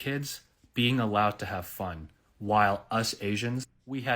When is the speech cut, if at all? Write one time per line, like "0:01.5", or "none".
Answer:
0:02.8